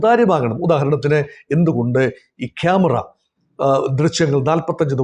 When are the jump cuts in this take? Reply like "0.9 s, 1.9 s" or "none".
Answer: none